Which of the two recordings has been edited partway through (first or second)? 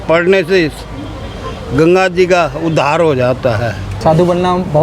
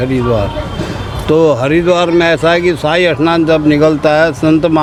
first